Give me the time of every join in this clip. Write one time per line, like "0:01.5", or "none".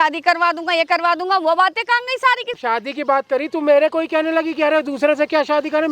0:02.6